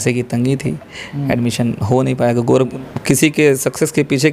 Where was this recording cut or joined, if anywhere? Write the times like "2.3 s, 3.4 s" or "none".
2.7 s